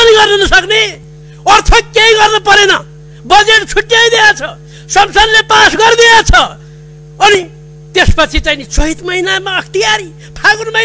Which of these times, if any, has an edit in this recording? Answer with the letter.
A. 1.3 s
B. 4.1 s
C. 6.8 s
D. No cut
D